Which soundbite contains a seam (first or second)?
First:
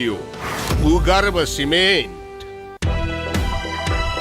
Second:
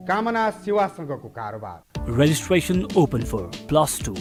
first